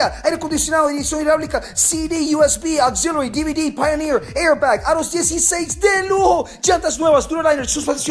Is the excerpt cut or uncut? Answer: uncut